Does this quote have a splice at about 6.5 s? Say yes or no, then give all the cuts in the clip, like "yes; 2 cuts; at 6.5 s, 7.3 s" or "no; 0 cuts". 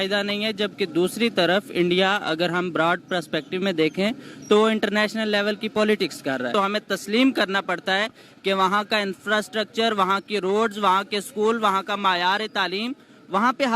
yes; 1 cut; at 6.5 s